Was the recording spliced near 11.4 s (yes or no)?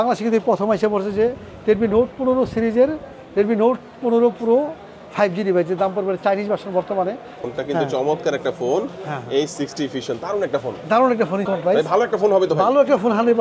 yes